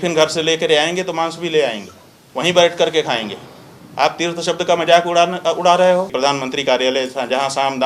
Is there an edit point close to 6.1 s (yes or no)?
yes